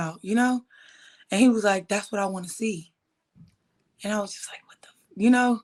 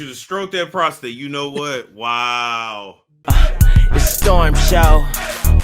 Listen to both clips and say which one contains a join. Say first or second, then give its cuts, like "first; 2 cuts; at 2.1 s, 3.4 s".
second; 1 cut; at 3.1 s